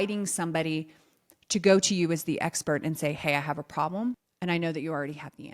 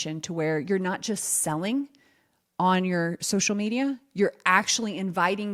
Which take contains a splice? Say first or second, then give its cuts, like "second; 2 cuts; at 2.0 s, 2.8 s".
first; 1 cut; at 4.3 s